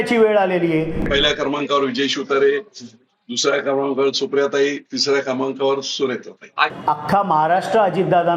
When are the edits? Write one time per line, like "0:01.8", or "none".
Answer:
0:01.0
0:06.7

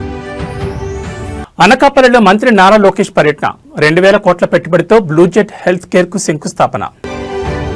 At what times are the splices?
0:01.3

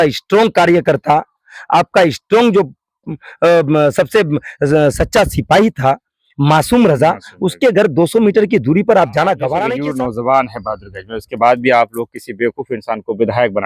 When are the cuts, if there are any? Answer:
0:09.8

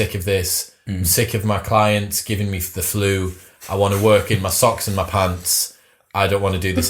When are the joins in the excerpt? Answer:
none

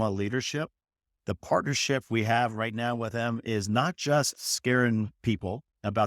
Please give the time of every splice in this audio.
0:01.0

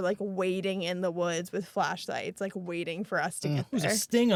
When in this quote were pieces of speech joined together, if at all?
none

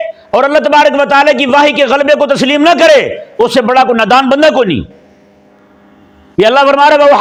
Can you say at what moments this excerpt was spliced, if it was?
none

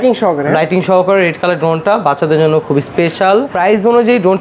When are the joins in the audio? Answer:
0:03.5

